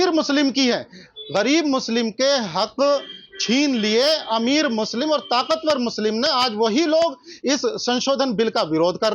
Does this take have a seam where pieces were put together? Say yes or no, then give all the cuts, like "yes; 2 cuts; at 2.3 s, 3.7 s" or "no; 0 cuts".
no; 0 cuts